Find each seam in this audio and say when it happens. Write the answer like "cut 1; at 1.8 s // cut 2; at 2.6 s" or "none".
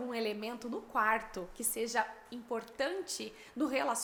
none